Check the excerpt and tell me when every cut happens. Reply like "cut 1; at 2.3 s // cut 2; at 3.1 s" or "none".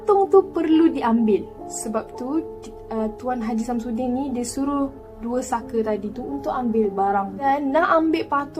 cut 1; at 7.4 s